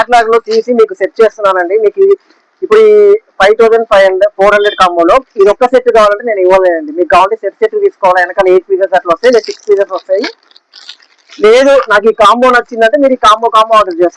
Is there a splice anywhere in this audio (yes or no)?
no